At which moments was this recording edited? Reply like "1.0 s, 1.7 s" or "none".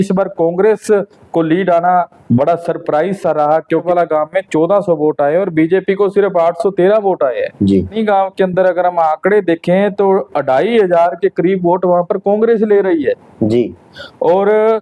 3.8 s, 8.0 s